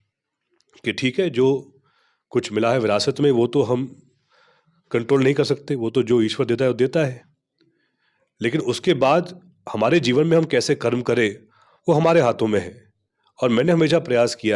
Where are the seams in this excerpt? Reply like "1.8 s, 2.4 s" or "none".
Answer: none